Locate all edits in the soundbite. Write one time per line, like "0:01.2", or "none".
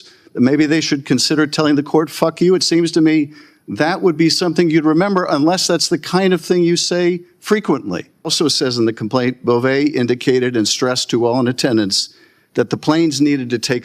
0:08.3